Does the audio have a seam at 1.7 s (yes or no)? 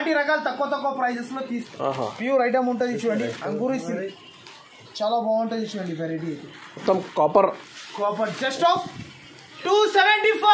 yes